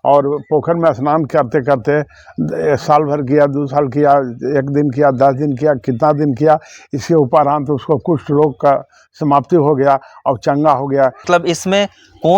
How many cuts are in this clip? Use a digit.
1